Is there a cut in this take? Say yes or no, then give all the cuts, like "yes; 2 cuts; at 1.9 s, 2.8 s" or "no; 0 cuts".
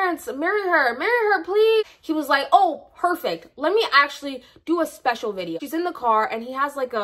yes; 2 cuts; at 1.9 s, 5.6 s